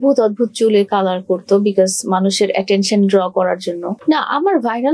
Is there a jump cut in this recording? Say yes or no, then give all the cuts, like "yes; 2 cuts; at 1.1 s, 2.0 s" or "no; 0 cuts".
yes; 1 cut; at 4.0 s